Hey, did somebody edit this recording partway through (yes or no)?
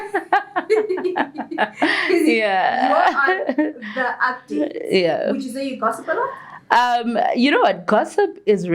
no